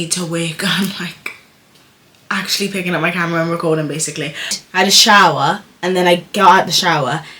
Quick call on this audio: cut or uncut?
cut